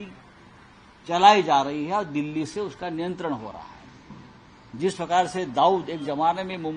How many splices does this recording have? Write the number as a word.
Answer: zero